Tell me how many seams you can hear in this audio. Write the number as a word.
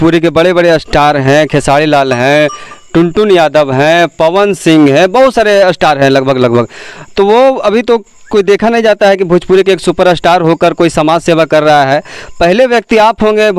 zero